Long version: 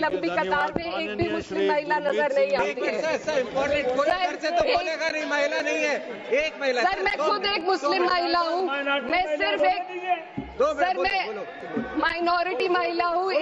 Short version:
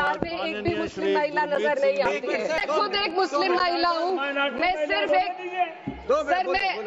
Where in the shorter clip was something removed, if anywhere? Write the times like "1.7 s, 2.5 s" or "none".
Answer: 2.6 s